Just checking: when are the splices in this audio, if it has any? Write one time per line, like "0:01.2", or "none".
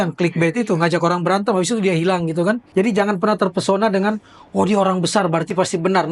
0:02.6